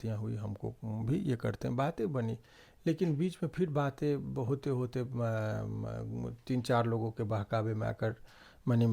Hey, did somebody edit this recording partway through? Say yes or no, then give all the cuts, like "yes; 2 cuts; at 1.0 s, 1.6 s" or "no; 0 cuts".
no; 0 cuts